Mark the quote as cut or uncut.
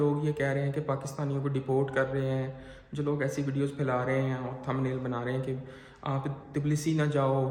uncut